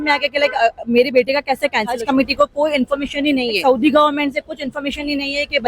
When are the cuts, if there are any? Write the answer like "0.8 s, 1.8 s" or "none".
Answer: 2.0 s, 3.6 s